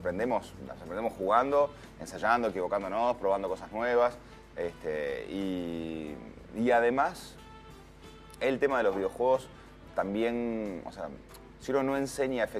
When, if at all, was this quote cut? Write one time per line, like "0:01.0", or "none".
0:03.9